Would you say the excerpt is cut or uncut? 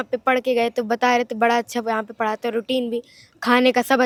uncut